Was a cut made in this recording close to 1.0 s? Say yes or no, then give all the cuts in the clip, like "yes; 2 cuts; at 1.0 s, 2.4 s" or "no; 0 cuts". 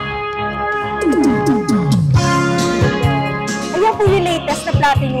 no; 1 cut; at 3.7 s